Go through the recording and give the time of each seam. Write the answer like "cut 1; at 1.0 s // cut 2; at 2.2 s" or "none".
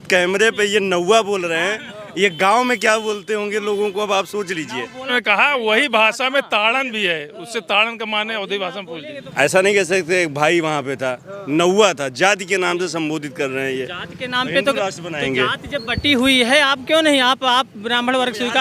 cut 1; at 5.1 s // cut 2; at 9.2 s